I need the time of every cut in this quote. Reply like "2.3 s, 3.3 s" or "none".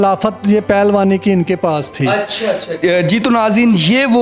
2.7 s